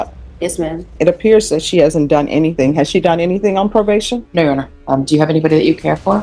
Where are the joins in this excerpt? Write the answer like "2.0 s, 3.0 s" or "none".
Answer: 0.9 s, 4.7 s

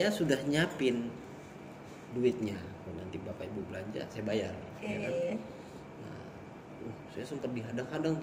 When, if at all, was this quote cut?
2.8 s

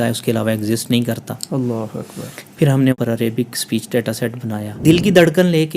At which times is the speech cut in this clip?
2.9 s, 4.8 s

